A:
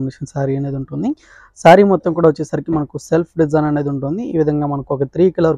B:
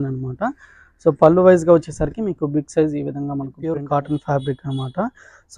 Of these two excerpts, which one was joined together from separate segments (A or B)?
B